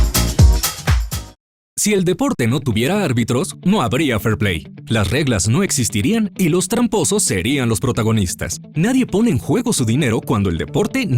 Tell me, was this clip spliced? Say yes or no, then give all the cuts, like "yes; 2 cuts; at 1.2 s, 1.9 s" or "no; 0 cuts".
yes; 1 cut; at 1.1 s